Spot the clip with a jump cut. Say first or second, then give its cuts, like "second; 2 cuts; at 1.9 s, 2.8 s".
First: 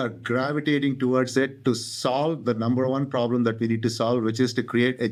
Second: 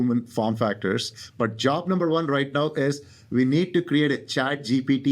second; 1 cut; at 1.2 s